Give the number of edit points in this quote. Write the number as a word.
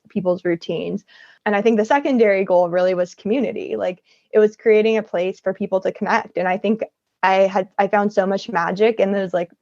one